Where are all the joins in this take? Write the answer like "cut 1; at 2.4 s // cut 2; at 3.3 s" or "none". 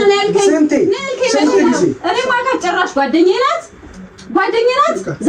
cut 1; at 2.0 s